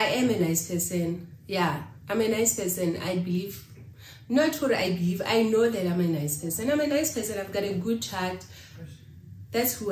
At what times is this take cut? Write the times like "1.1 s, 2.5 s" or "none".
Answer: none